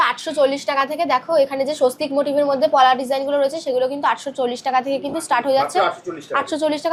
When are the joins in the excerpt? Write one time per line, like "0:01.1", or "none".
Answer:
none